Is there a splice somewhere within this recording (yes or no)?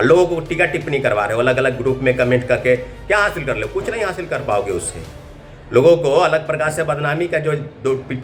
no